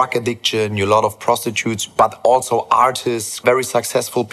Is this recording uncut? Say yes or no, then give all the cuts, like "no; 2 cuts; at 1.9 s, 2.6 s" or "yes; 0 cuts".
no; 1 cut; at 3.4 s